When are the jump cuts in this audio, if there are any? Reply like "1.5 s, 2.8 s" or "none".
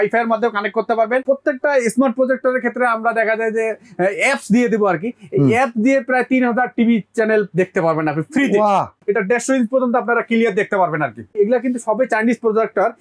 1.2 s, 8.9 s, 11.3 s